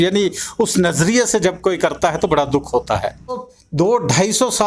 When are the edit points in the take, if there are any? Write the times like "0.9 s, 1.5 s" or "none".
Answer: 3.5 s